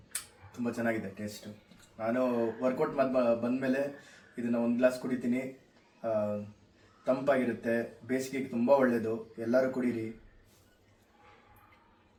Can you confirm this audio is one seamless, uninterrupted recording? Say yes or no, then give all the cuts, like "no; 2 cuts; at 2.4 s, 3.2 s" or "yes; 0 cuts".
yes; 0 cuts